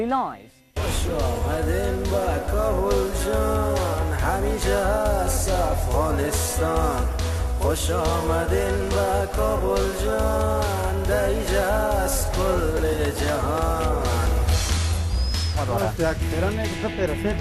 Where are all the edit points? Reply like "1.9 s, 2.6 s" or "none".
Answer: none